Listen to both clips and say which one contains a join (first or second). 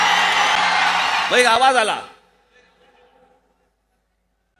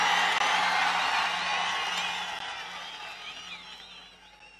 first